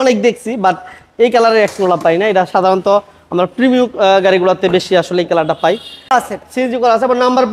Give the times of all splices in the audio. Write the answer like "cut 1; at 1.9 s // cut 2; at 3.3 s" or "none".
cut 1; at 6.1 s